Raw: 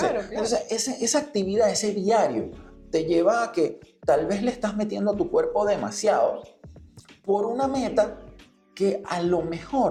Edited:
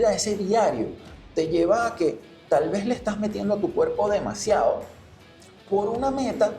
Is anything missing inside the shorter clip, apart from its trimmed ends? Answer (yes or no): no